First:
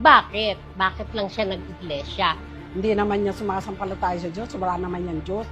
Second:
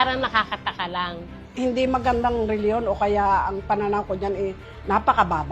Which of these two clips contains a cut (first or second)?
second